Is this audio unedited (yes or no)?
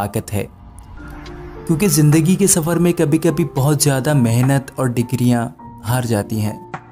yes